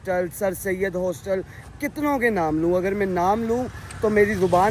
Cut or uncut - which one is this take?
uncut